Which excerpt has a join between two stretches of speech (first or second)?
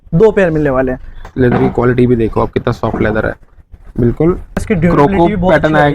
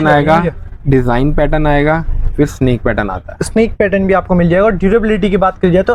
first